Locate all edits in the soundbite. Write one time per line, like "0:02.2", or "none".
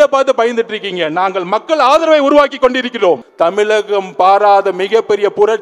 0:03.3

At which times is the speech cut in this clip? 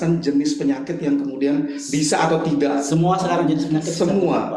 none

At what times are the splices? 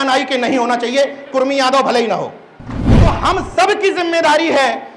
0:02.9

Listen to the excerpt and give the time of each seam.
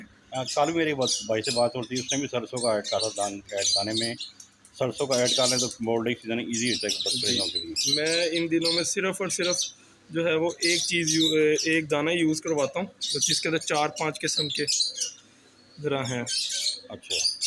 none

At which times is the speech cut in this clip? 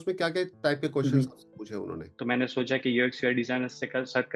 0:02.0

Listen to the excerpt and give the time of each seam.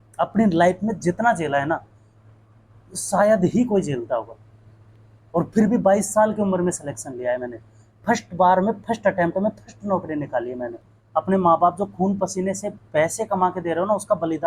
0:10.9

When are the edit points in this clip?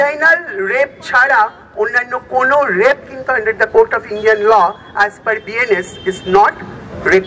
none

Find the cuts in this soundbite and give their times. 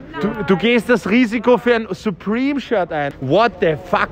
0:03.1

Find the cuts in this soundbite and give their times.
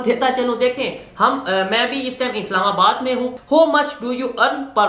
0:03.4

